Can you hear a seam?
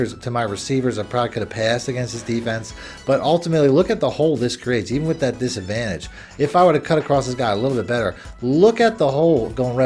no; 0 cuts

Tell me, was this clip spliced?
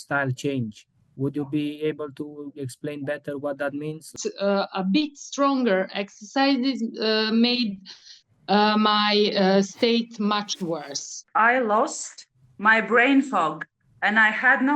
yes; 2 cuts; at 4.1 s, 11.2 s

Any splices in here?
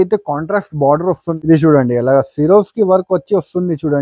yes; 1 cut; at 1.3 s

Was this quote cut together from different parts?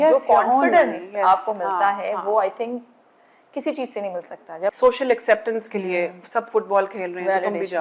yes; 1 cut; at 4.8 s

